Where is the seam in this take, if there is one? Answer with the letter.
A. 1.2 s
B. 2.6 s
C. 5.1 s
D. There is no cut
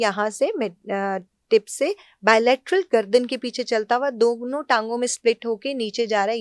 D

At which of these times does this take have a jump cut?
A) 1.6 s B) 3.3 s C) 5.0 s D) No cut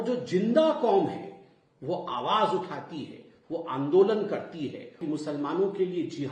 C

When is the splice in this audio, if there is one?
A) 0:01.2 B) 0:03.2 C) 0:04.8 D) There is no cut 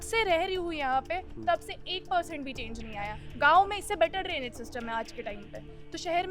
B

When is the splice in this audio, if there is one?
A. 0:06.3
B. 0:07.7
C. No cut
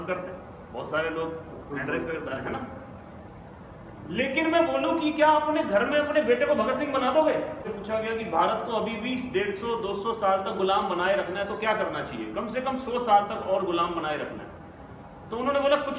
B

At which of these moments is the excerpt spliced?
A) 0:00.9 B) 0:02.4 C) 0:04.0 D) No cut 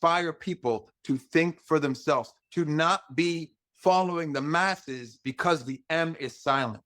B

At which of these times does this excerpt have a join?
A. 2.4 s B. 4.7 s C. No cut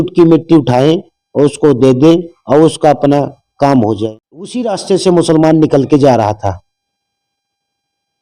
B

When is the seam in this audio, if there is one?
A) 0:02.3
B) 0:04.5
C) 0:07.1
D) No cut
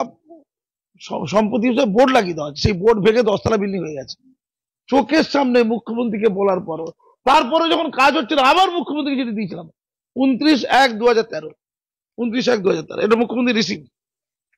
D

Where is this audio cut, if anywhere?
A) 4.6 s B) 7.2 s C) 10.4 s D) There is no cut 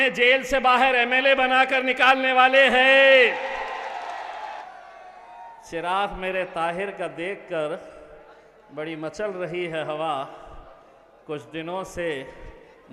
A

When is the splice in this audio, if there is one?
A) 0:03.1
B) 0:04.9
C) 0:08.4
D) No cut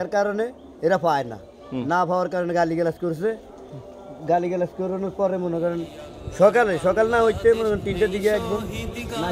D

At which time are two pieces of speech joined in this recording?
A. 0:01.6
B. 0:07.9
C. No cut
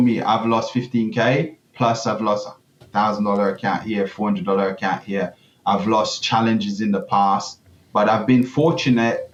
C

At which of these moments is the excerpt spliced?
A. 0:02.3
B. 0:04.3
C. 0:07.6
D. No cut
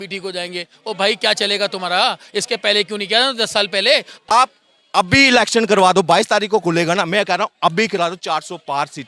B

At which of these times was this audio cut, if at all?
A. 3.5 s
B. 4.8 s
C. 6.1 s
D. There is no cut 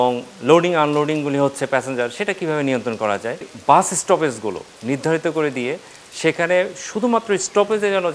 A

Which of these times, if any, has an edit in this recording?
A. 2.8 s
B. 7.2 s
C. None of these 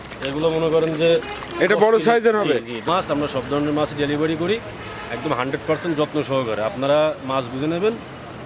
A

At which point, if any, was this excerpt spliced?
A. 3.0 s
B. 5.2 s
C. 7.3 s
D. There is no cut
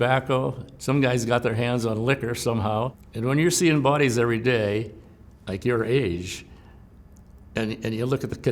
A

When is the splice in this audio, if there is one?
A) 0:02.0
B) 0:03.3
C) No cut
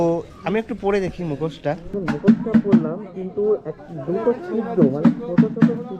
A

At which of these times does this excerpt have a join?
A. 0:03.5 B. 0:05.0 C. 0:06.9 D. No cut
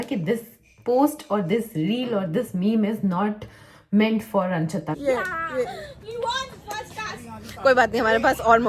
B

